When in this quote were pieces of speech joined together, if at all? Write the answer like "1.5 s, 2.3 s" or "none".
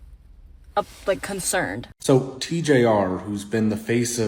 1.9 s